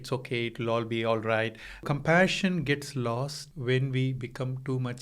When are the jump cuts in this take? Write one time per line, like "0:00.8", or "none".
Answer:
0:01.8
0:03.4